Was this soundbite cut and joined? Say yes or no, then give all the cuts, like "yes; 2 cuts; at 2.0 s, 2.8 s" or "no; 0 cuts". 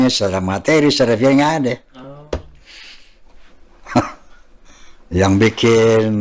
no; 0 cuts